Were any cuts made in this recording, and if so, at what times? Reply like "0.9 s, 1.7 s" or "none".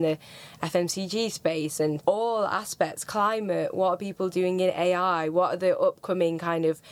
2.0 s